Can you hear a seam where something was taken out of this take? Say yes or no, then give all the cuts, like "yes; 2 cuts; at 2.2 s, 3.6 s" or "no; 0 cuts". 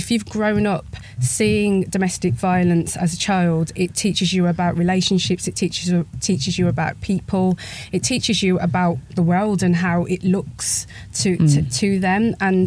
no; 0 cuts